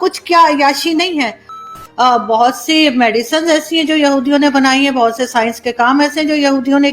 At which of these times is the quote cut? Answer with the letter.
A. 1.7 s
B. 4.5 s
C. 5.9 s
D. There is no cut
A